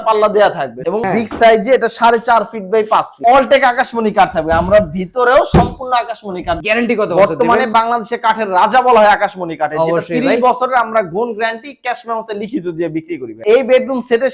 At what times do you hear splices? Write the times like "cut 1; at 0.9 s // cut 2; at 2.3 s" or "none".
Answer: cut 1; at 0.8 s // cut 2; at 3.2 s // cut 3; at 6.6 s // cut 4; at 13.3 s